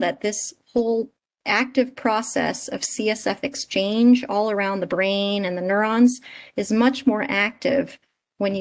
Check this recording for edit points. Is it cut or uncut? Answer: uncut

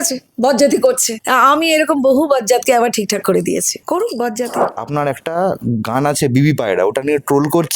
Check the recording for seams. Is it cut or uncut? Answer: cut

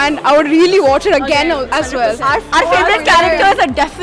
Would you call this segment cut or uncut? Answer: cut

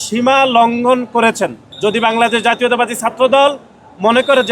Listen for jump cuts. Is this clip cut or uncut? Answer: cut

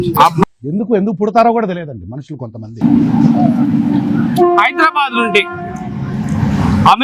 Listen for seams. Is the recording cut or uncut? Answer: cut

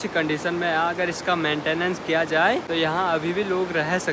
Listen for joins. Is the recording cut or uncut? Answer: uncut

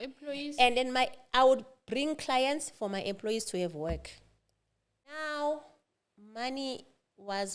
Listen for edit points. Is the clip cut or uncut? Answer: cut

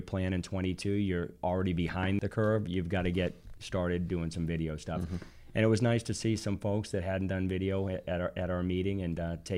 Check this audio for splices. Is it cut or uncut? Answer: cut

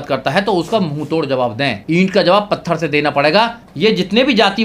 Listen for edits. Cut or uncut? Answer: cut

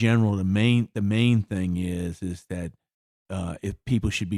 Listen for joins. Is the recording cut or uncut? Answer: uncut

